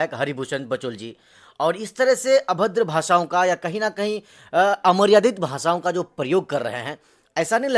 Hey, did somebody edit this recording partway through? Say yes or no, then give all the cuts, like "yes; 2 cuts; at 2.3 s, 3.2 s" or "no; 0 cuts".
no; 0 cuts